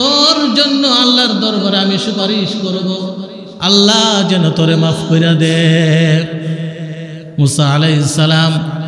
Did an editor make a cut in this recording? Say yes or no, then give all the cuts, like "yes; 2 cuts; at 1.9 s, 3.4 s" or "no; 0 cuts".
no; 0 cuts